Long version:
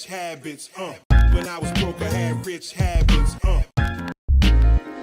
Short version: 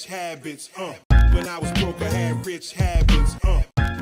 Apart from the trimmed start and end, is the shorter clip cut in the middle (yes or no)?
no